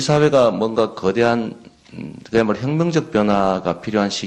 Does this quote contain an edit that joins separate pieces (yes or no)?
no